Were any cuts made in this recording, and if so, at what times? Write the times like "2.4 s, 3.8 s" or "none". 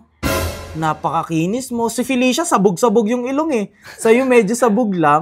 none